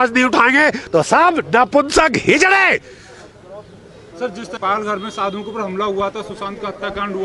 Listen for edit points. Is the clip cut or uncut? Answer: uncut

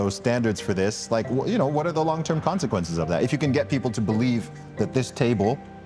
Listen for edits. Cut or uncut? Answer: uncut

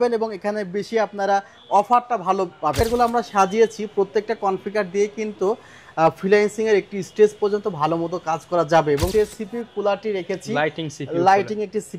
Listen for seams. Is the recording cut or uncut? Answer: cut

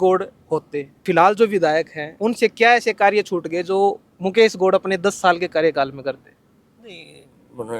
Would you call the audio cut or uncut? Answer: cut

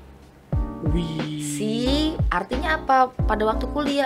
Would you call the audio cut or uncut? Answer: uncut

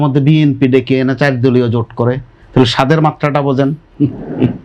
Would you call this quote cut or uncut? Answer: uncut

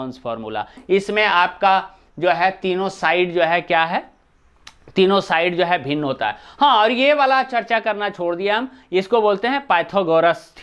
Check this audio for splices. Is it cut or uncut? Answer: uncut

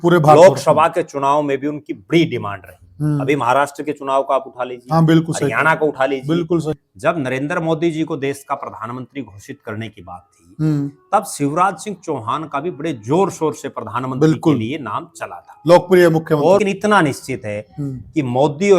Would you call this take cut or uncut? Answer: cut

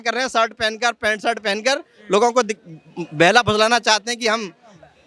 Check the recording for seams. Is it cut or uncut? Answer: uncut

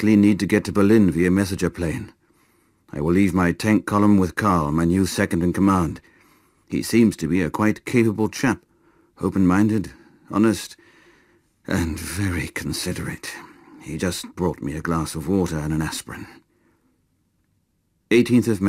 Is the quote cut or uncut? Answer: cut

